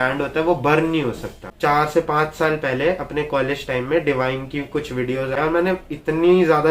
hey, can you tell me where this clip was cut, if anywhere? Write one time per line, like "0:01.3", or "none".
0:01.5
0:05.3